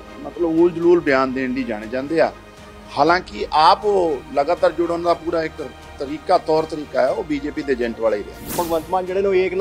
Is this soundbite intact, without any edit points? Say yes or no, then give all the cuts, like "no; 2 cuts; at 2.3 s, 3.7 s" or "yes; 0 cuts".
no; 1 cut; at 8.5 s